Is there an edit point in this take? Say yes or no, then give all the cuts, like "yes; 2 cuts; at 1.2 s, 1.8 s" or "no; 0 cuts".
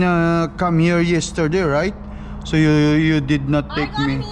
no; 0 cuts